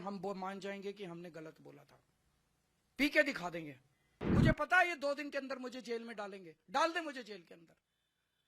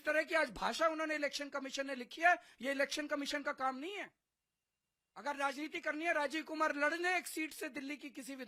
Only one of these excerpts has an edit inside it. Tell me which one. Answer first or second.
first